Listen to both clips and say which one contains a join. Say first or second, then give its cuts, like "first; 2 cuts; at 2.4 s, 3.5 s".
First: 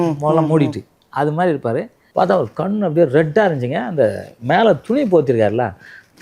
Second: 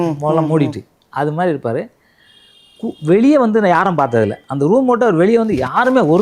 first; 1 cut; at 2.0 s